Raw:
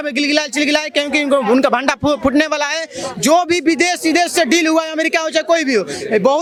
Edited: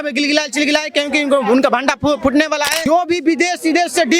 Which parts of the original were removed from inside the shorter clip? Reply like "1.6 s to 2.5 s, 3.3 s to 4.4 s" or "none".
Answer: 2.8 s to 3.2 s

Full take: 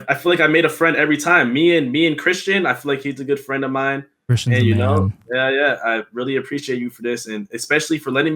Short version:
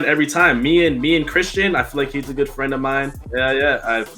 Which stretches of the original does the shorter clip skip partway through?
4.1 s to 5.2 s

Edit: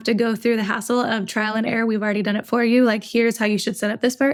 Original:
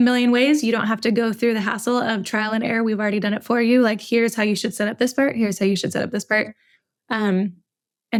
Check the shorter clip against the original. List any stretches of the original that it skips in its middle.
none

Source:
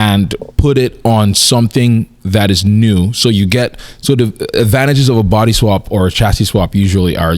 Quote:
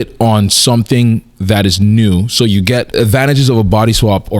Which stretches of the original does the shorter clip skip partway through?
3.7 s to 4.5 s

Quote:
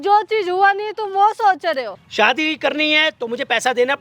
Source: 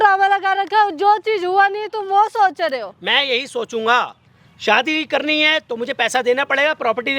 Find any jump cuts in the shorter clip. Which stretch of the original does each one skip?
2.9 s to 4.5 s

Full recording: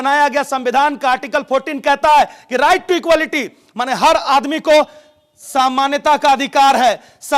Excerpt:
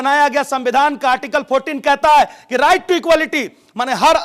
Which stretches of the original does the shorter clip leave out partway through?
none

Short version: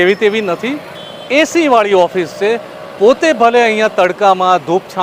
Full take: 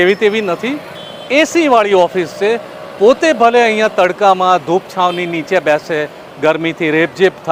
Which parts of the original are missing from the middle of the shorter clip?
none

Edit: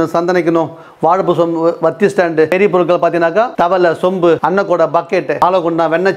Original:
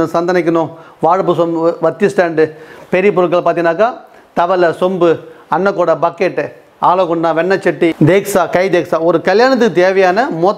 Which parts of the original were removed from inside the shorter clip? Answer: 2.5 s to 2.9 s, 3.9 s to 4.3 s, 5.2 s to 5.5 s, 6.5 s to 6.9 s

